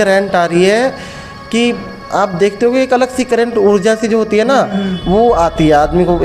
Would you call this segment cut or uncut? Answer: uncut